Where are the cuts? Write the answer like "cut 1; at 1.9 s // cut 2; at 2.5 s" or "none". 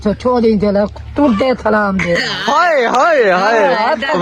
none

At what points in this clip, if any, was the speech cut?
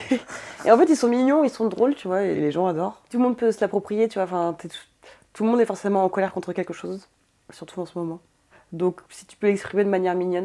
cut 1; at 3.1 s // cut 2; at 8.6 s

